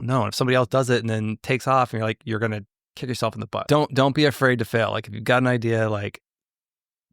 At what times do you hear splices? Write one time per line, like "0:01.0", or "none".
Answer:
0:03.6